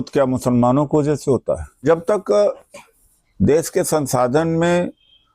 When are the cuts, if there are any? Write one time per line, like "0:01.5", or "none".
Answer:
0:01.8